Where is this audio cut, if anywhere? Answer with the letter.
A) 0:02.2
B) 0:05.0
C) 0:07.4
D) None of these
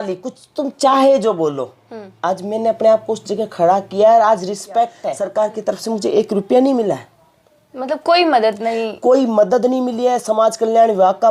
B